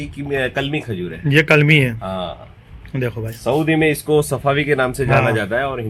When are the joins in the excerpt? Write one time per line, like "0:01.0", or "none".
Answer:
none